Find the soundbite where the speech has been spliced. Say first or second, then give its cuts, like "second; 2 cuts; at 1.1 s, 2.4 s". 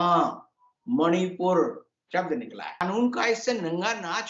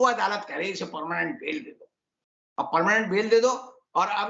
first; 1 cut; at 2.8 s